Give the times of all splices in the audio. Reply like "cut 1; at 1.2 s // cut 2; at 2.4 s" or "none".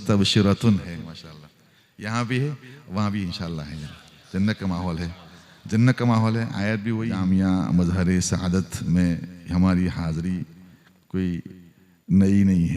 cut 1; at 7.1 s